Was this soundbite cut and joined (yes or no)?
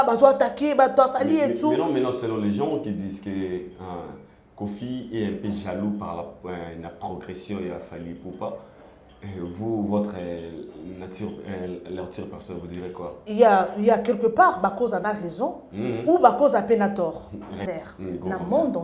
yes